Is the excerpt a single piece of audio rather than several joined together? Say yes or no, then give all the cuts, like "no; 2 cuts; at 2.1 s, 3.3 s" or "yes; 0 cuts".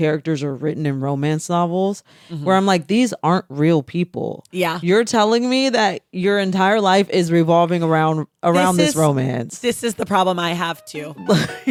yes; 0 cuts